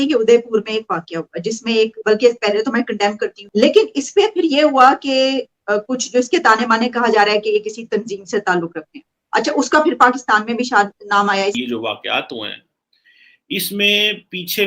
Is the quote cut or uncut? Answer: cut